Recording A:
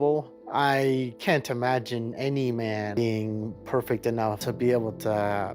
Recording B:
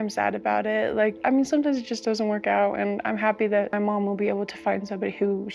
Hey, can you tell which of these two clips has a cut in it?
A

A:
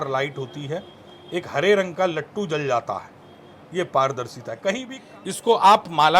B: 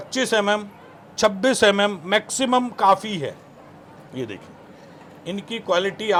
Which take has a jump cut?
A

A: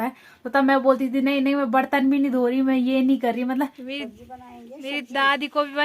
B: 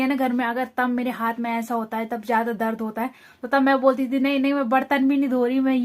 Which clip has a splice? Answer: A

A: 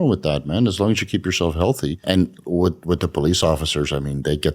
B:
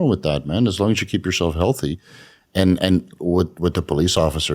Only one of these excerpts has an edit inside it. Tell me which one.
A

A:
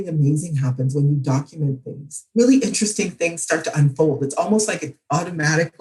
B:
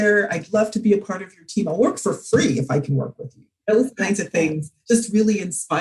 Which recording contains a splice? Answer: B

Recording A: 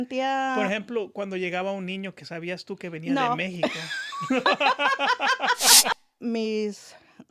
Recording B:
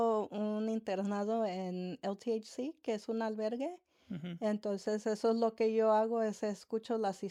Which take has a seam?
A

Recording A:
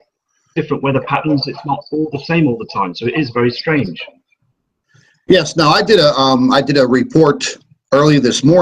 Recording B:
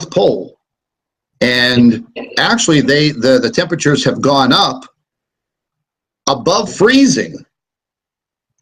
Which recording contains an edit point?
A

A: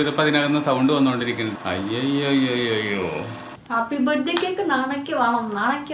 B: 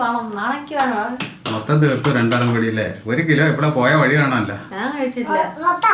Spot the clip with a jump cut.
A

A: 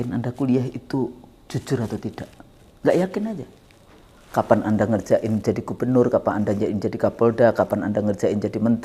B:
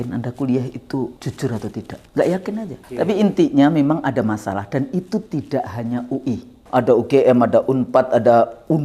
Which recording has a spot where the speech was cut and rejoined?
B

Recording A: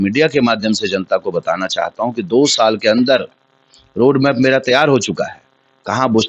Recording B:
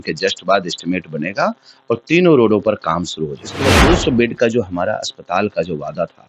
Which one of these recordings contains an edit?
B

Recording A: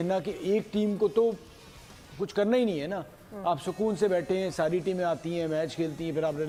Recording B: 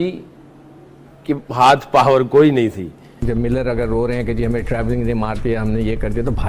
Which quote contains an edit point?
B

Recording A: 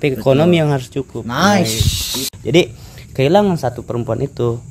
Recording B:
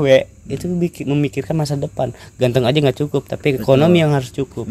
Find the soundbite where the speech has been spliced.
A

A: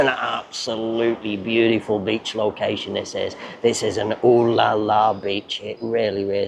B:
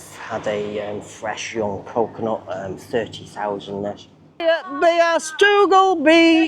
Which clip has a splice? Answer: B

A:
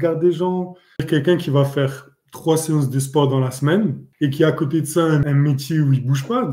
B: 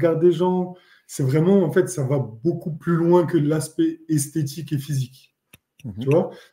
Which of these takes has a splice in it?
A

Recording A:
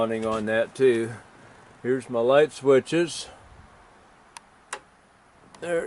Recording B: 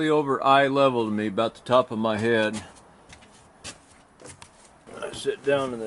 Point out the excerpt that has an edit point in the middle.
B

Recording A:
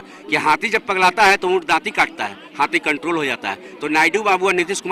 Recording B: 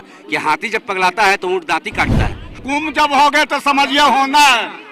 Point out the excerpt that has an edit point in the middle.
B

